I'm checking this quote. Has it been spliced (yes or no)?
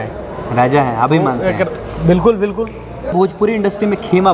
yes